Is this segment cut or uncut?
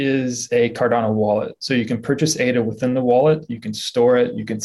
uncut